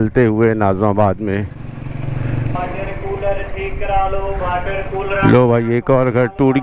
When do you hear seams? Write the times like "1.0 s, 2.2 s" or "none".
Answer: 2.6 s